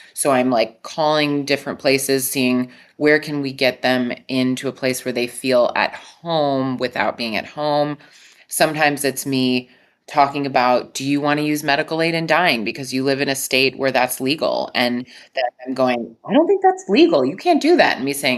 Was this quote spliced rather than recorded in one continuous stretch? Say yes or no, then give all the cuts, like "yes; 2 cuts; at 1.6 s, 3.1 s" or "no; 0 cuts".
no; 0 cuts